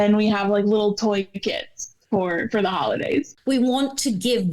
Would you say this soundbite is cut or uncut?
cut